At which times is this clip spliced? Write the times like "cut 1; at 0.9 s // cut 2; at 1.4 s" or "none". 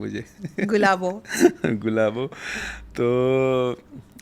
none